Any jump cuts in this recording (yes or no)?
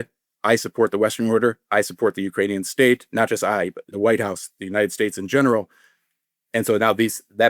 no